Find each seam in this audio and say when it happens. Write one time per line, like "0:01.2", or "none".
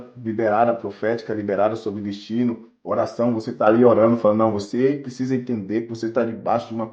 none